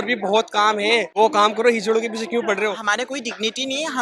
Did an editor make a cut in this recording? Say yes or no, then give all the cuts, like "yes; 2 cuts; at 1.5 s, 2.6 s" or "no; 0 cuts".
yes; 2 cuts; at 1.1 s, 2.8 s